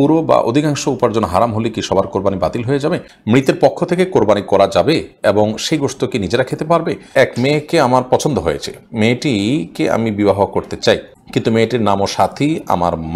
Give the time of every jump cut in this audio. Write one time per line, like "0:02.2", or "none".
0:03.1
0:07.1
0:11.2